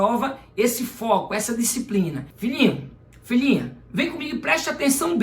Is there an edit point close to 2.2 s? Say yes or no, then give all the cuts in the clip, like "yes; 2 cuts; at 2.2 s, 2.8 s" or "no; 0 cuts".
yes; 1 cut; at 2.2 s